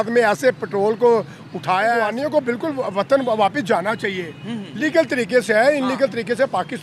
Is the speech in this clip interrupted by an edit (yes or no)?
yes